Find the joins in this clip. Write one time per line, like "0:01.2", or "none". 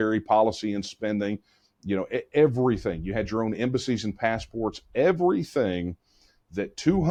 none